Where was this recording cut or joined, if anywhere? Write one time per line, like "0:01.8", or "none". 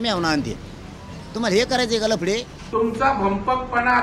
0:02.6